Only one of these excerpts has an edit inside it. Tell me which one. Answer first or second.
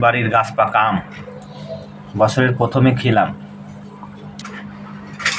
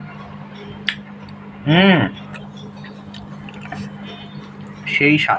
first